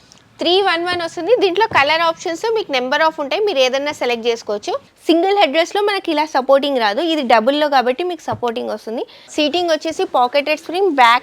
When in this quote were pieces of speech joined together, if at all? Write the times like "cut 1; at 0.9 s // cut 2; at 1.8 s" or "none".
cut 1; at 4.9 s // cut 2; at 9.2 s